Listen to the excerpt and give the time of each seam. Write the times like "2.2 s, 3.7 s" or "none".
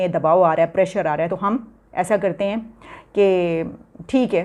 1.3 s